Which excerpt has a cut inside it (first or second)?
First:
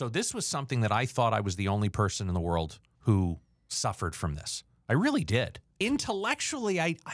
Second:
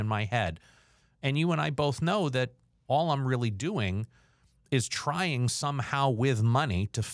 first